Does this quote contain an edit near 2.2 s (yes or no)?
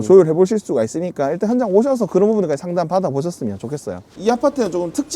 no